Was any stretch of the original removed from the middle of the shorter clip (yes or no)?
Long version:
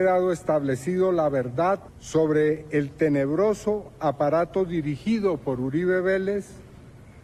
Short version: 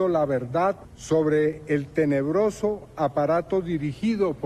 no